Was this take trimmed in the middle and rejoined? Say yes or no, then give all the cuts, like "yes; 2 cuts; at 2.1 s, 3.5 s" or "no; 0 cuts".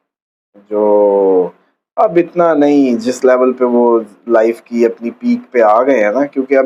no; 0 cuts